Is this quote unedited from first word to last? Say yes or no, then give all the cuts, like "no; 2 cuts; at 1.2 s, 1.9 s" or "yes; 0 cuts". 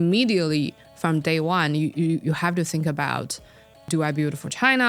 no; 1 cut; at 3.9 s